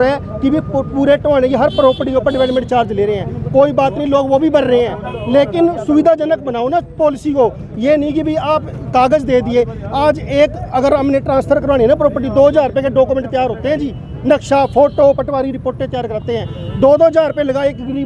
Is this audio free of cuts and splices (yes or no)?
yes